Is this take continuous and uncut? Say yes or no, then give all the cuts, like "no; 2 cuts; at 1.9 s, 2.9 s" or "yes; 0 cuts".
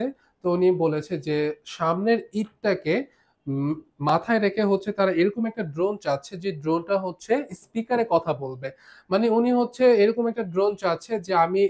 yes; 0 cuts